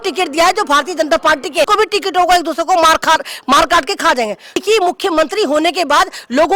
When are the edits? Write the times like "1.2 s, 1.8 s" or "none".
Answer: 1.7 s, 4.6 s